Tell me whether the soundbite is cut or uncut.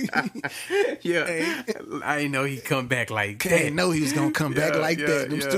uncut